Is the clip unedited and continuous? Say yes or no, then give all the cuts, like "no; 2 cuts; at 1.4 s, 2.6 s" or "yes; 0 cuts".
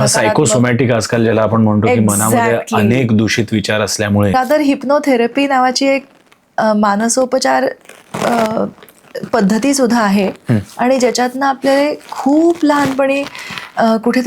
no; 1 cut; at 4.3 s